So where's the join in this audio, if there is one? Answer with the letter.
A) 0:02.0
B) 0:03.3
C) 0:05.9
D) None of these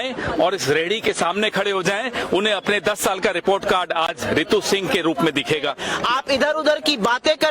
C